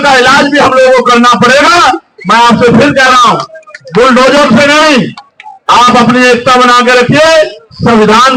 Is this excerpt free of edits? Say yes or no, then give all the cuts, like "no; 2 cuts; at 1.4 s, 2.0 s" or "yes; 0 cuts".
yes; 0 cuts